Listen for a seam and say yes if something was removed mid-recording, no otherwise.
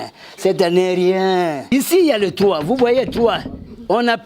yes